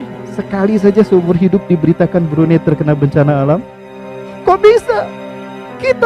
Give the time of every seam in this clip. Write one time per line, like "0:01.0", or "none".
0:04.3